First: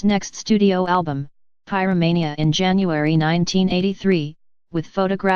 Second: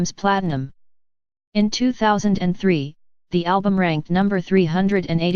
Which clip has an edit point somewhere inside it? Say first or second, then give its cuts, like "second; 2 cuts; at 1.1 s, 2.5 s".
second; 1 cut; at 4.4 s